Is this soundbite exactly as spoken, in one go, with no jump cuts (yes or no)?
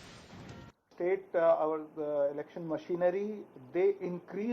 no